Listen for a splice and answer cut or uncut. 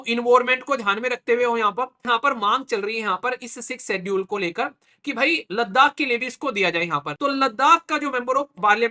cut